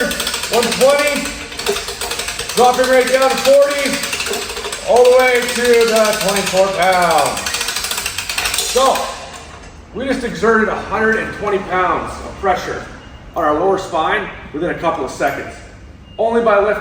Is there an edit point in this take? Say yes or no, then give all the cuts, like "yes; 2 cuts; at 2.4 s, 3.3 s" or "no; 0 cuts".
no; 0 cuts